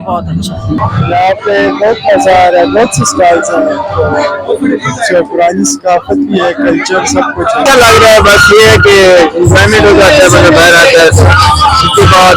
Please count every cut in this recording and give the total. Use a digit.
2